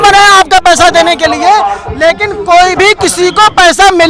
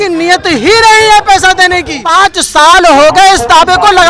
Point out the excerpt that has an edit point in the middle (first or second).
second